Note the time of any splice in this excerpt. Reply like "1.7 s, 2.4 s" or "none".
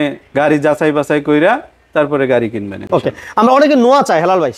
none